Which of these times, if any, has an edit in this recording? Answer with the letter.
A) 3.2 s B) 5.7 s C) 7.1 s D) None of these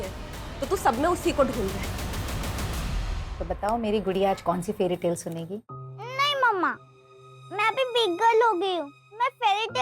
A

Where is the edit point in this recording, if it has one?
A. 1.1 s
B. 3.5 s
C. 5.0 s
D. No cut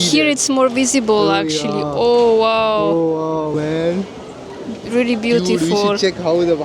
B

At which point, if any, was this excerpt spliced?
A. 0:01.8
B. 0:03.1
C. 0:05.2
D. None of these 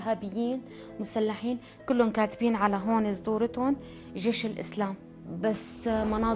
C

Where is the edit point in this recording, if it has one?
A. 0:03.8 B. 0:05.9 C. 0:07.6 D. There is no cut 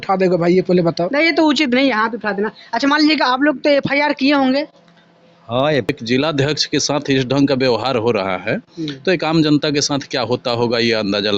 B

